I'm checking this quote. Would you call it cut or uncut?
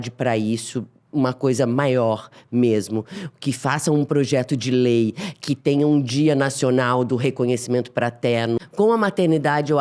cut